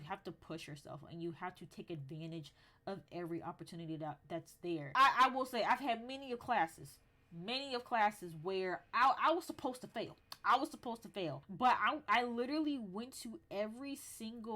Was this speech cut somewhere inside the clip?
yes; 2 cuts; at 4.9 s, 11.4 s

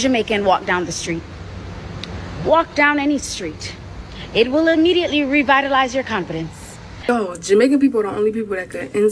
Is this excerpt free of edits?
no; 1 cut; at 6.9 s

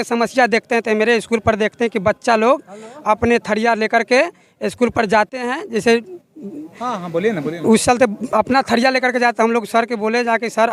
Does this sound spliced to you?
no; 0 cuts

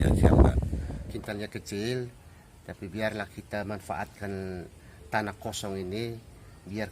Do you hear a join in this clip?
yes; 1 cut; at 0.9 s

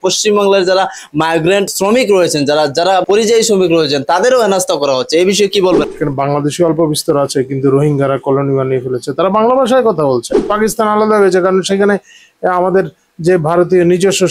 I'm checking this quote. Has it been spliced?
yes; 4 cuts; at 1.7 s, 3.0 s, 5.8 s, 10.5 s

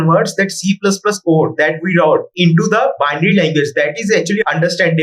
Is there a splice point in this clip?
yes; 1 cut; at 2.3 s

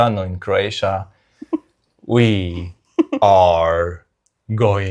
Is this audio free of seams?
yes; 0 cuts

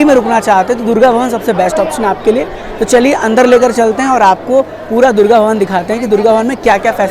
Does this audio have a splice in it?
no; 0 cuts

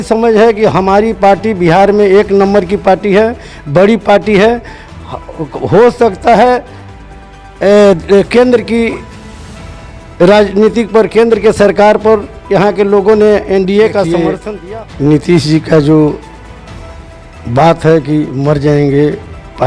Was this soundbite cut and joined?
yes; 1 cut; at 14.3 s

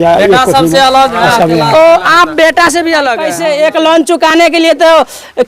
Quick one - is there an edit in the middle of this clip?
yes; 1 cut; at 3.3 s

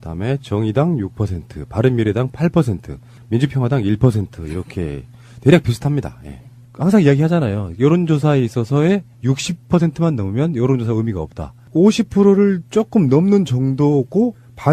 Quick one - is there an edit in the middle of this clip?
no; 0 cuts

